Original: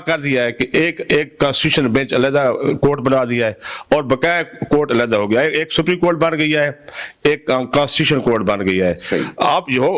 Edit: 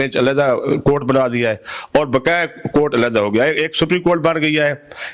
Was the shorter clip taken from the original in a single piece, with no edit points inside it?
yes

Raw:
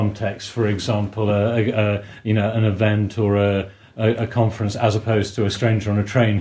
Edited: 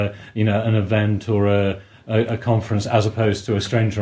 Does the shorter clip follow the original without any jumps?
yes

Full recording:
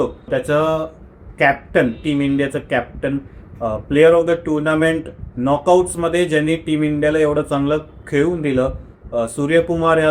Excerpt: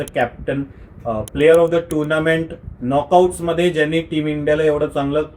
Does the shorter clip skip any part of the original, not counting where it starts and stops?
no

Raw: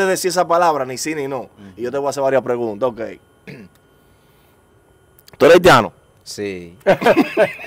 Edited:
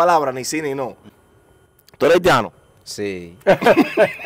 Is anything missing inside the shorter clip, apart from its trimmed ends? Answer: yes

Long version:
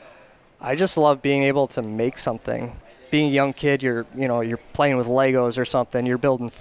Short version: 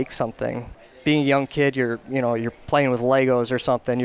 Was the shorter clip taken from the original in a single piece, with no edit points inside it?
yes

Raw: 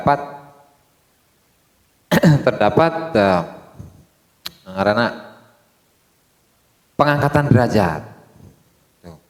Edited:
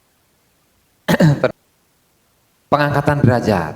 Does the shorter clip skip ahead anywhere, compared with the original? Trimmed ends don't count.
yes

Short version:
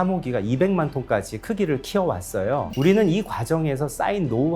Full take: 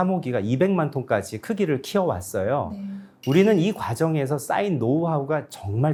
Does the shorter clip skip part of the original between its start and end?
yes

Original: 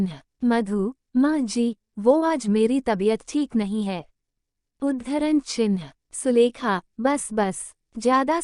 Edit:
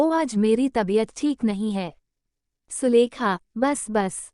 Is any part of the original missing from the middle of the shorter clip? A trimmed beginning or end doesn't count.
yes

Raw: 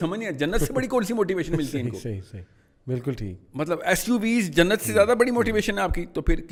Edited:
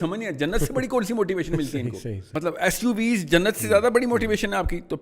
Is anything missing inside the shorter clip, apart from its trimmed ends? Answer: yes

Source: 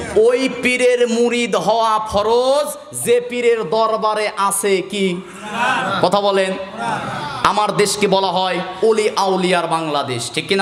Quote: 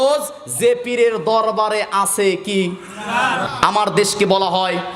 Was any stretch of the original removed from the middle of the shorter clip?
yes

